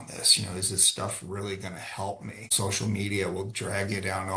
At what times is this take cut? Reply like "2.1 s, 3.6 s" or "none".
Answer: 2.5 s